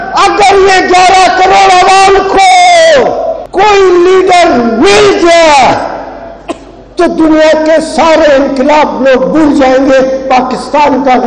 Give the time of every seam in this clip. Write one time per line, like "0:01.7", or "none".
0:03.4